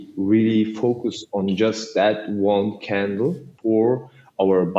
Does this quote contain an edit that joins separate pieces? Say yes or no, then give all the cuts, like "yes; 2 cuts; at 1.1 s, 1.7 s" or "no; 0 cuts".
yes; 1 cut; at 3.5 s